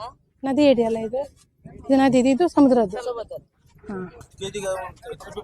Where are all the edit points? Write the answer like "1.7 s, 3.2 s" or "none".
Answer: 4.2 s